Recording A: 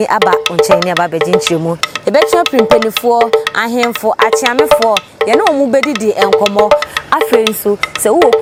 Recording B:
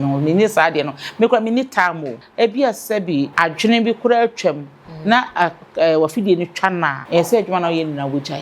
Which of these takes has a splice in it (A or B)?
B